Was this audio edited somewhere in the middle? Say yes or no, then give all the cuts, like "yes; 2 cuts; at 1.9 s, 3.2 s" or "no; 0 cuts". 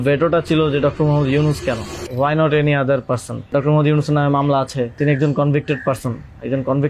yes; 3 cuts; at 2.0 s, 3.5 s, 5.0 s